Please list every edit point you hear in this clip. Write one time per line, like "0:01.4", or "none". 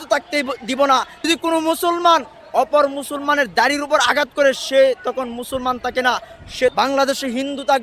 0:01.2
0:06.7